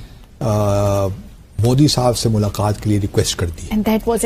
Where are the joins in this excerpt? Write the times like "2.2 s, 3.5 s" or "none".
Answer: none